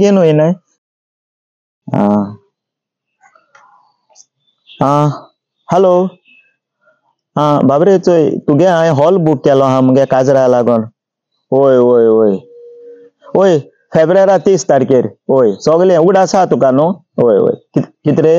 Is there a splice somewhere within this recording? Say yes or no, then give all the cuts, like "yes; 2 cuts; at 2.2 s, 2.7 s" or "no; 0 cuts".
yes; 1 cut; at 1.1 s